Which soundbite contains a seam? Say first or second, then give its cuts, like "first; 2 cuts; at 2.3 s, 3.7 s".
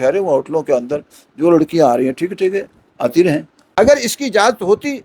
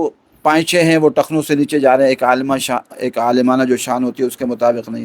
first; 1 cut; at 3.6 s